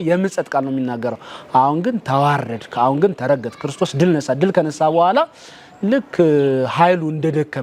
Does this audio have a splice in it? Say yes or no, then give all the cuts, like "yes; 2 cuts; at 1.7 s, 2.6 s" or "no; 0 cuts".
no; 0 cuts